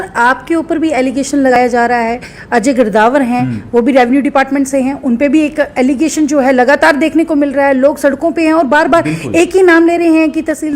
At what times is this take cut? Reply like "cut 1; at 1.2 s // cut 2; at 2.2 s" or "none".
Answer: cut 1; at 1.6 s

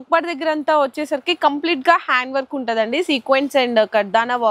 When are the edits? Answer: none

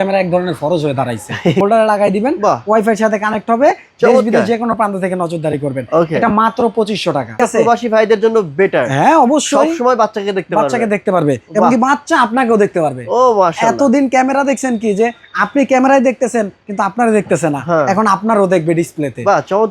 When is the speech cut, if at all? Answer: cut 1; at 1.6 s // cut 2; at 7.4 s

